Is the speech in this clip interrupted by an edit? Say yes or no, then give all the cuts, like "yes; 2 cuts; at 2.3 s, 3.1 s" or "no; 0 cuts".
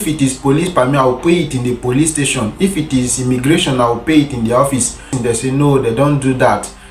yes; 1 cut; at 5.1 s